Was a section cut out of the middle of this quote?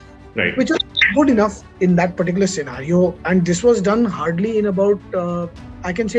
no; 0 cuts

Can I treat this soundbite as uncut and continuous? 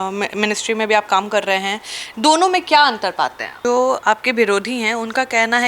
no; 1 cut; at 3.6 s

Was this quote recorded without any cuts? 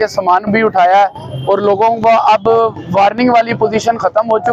yes; 0 cuts

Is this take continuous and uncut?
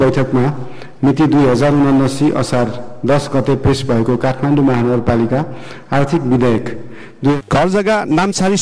no; 1 cut; at 7.3 s

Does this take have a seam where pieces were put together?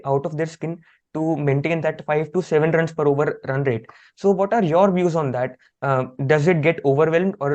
no; 0 cuts

